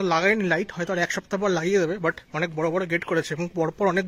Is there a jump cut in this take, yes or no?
no